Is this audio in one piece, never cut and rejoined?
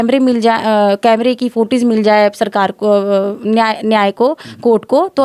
yes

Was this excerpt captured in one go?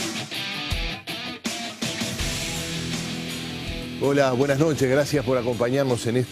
no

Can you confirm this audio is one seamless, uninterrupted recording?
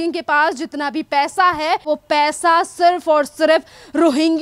no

